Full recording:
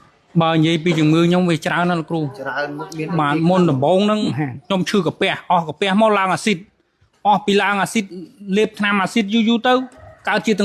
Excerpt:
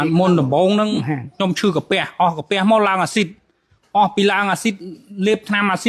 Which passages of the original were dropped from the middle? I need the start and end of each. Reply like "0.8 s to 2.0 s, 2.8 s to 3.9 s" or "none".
none